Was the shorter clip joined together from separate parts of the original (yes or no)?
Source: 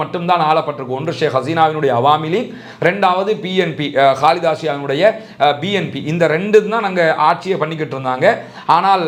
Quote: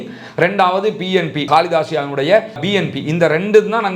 yes